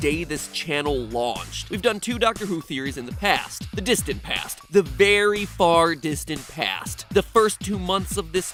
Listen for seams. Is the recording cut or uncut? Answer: uncut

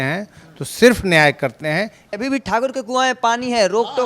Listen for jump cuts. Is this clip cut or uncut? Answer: cut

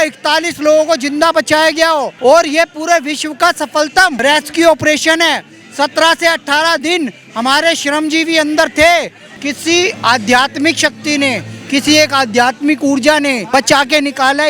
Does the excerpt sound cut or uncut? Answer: cut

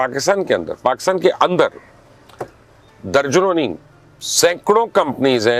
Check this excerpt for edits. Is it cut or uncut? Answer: uncut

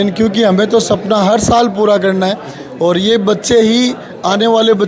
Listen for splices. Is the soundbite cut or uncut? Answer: uncut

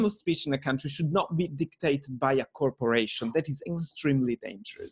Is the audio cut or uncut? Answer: uncut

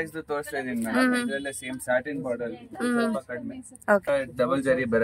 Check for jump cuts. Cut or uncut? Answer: cut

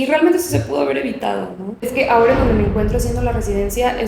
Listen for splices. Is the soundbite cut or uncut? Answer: cut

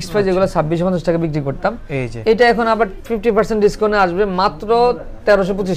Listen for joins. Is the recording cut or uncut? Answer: uncut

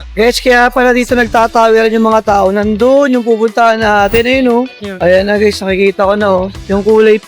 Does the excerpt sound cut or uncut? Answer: cut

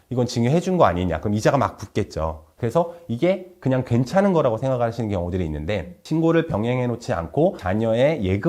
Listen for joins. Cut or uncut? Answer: cut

